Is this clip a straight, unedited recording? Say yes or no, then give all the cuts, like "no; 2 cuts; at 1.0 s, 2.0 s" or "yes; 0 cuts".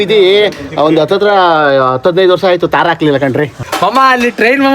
no; 1 cut; at 3.6 s